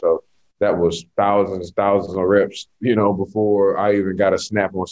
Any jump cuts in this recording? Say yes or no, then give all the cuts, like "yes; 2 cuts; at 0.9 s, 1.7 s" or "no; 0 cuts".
no; 0 cuts